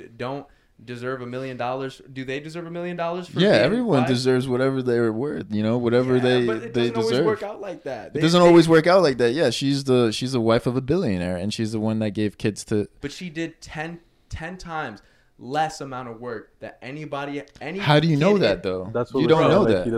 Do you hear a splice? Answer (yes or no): no